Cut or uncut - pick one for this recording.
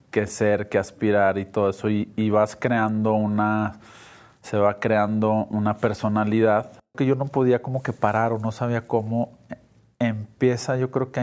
cut